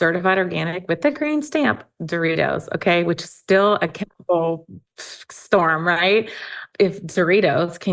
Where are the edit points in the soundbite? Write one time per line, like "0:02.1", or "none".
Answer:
0:06.6